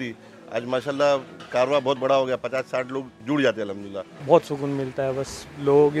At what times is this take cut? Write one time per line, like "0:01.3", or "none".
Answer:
0:01.4
0:03.1
0:04.2